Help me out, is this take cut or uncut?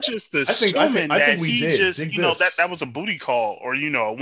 uncut